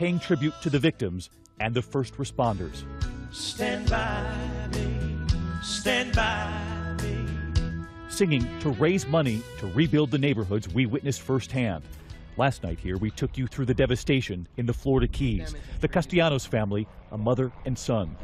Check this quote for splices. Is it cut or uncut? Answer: uncut